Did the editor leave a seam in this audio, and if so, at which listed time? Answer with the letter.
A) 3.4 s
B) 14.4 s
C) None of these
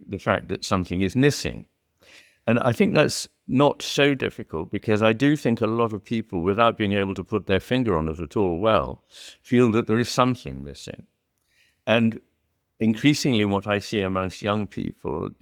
C